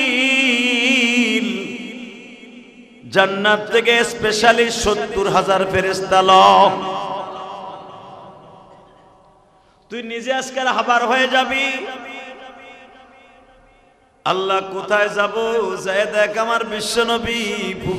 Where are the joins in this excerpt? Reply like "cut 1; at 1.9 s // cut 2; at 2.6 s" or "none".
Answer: none